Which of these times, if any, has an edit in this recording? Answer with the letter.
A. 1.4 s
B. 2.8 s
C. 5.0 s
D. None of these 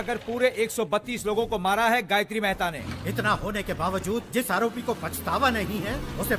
B